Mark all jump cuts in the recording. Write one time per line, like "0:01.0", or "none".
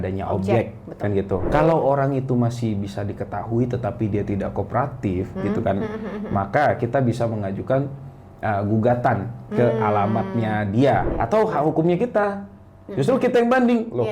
0:01.4
0:11.1